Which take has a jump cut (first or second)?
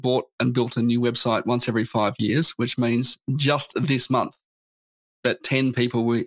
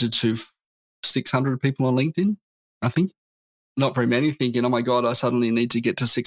second